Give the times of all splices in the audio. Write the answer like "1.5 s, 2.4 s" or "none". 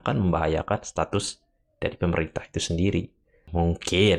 none